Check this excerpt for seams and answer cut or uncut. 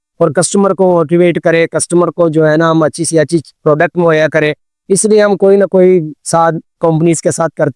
uncut